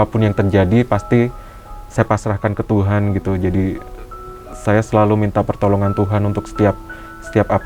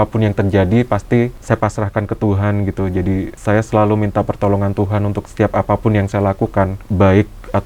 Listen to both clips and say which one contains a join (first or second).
second